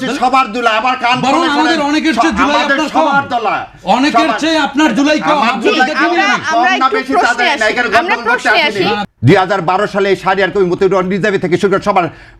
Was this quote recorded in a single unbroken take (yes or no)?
no